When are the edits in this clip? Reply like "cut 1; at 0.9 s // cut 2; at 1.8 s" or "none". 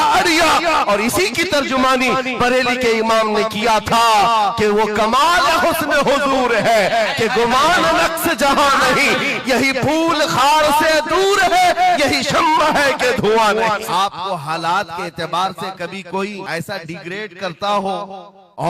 cut 1; at 13.8 s // cut 2; at 16.4 s